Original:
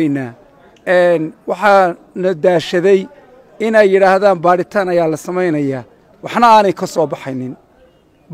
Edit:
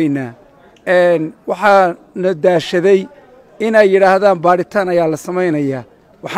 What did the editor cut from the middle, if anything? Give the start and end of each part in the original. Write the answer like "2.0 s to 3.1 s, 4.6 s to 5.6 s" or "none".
none